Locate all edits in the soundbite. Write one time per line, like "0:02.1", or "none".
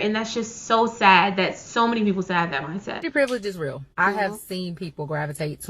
0:03.0
0:03.8

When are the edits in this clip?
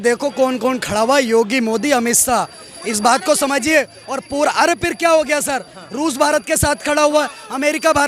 none

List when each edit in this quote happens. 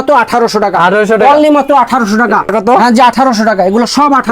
0:02.5

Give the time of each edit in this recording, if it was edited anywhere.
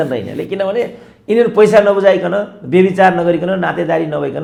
none

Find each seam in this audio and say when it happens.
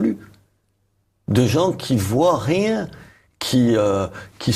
0:01.9

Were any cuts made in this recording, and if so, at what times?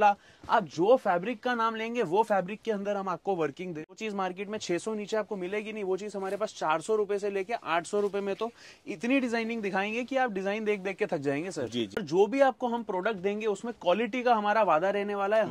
0:03.9
0:12.0

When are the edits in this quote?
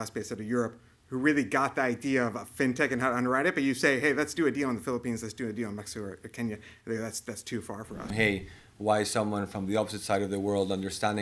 0:08.1

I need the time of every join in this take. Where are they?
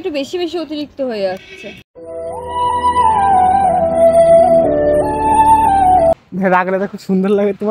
0:06.1

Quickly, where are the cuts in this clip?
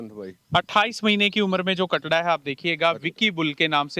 none

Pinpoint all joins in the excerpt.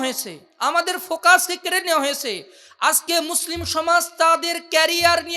none

